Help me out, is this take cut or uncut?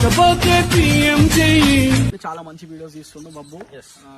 cut